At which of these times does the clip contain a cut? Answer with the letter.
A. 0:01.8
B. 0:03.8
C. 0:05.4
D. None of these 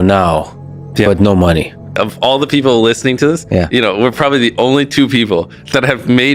A